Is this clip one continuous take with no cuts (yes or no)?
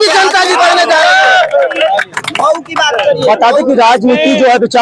yes